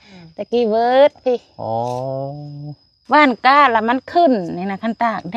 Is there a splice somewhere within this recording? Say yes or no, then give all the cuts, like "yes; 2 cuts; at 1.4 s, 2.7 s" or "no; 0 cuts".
yes; 1 cut; at 2.9 s